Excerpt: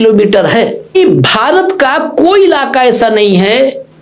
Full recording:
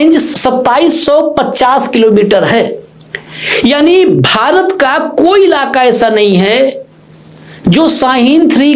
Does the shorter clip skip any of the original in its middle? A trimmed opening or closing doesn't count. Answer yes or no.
yes